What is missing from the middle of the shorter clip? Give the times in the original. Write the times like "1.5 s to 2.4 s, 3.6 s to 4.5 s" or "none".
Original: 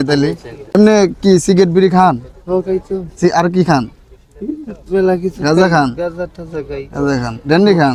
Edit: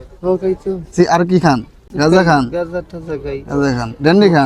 4.1 s to 5.3 s